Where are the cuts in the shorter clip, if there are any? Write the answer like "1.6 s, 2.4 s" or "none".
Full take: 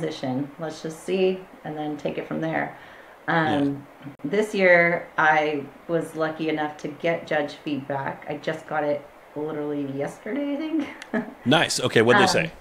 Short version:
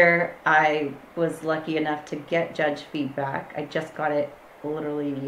none